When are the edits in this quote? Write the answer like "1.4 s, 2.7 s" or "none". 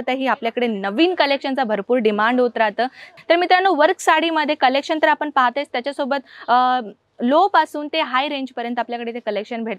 3.1 s